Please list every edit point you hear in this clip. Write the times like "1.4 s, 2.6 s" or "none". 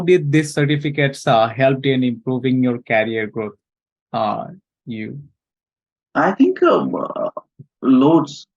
none